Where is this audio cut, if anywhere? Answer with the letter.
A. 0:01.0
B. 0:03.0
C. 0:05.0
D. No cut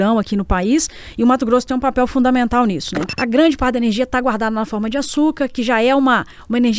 B